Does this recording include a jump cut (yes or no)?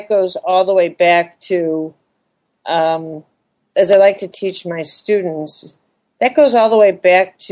yes